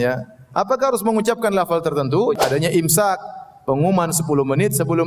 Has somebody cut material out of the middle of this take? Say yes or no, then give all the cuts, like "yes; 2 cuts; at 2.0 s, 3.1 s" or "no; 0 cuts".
yes; 1 cut; at 2.4 s